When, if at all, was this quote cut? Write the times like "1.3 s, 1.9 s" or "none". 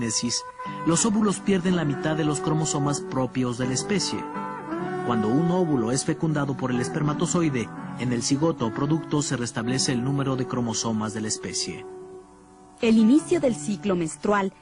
12.7 s